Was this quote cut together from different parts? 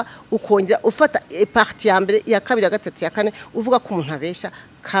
no; 0 cuts

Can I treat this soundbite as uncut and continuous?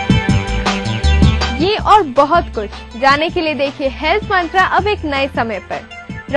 yes; 0 cuts

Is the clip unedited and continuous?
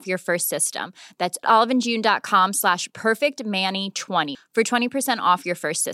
yes; 0 cuts

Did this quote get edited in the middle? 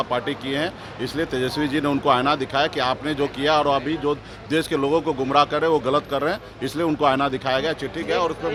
no; 0 cuts

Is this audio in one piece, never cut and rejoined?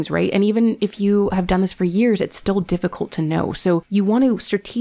no; 1 cut; at 3.9 s

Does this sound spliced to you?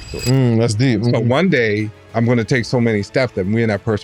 no; 0 cuts

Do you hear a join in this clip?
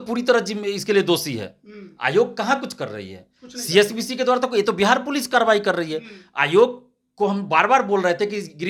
no; 0 cuts

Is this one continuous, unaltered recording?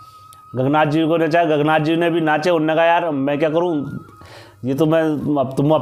yes; 0 cuts

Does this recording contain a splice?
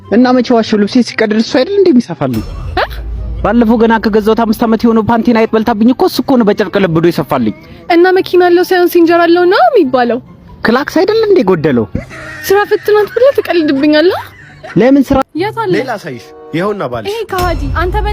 yes; 1 cut; at 15.2 s

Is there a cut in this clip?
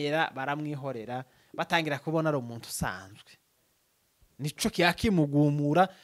no; 0 cuts

